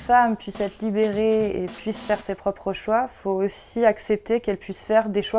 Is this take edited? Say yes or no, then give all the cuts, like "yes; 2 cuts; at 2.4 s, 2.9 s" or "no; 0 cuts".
no; 0 cuts